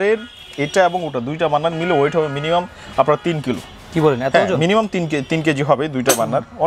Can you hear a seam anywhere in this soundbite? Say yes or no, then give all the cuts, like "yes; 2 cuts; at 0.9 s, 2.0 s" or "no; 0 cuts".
no; 0 cuts